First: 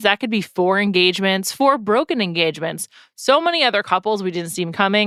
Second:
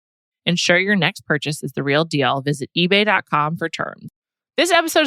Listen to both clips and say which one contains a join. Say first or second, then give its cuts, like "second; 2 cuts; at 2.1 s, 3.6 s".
second; 1 cut; at 4.1 s